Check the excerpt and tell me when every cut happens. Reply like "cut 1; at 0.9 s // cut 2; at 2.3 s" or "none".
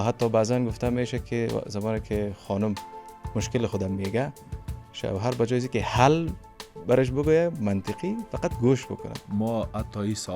cut 1; at 9.2 s

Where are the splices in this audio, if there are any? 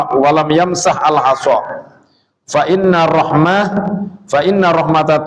none

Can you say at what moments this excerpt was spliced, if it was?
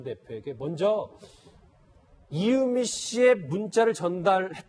none

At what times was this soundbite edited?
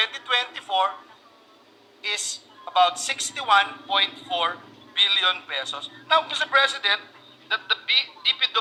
none

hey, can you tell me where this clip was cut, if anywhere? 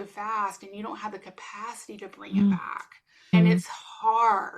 cut 1; at 3.3 s

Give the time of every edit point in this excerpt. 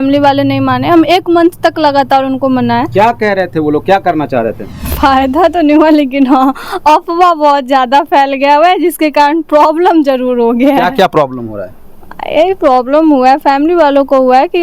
cut 1; at 4.7 s

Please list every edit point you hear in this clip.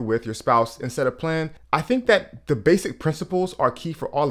none

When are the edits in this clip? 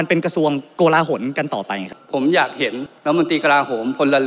cut 1; at 1.9 s

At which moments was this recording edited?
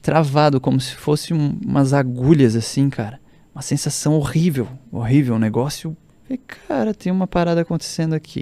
none

